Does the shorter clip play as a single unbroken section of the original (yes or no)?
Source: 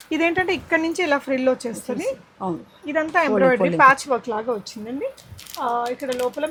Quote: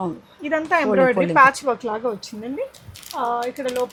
yes